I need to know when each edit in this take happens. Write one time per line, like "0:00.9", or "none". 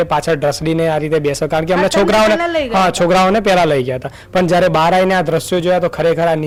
none